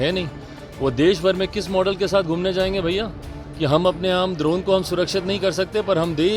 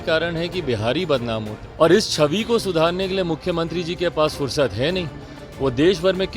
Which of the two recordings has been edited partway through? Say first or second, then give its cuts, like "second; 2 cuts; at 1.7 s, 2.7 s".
second; 1 cut; at 1.6 s